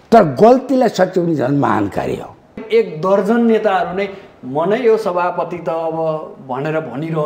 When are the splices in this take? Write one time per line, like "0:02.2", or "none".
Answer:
0:02.6